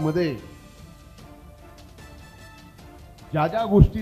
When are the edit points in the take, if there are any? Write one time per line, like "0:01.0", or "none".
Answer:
none